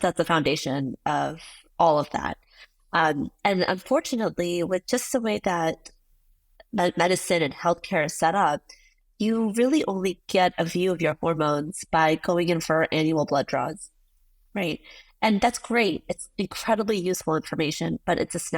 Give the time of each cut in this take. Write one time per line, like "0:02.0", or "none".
none